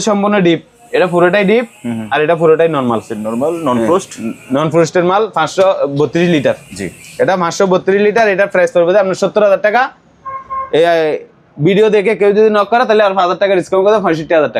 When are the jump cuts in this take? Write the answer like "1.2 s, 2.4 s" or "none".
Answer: none